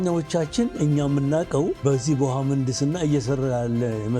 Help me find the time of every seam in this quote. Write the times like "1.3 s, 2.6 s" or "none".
1.8 s